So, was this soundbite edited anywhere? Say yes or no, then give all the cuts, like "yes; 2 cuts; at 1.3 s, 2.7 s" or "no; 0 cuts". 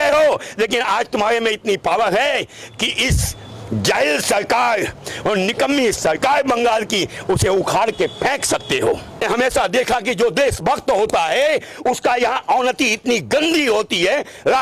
yes; 1 cut; at 9.2 s